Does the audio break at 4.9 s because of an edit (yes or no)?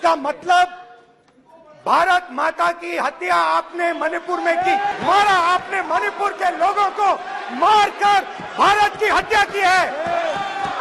yes